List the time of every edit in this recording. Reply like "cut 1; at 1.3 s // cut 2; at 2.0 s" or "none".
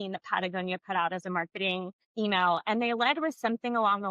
cut 1; at 2.0 s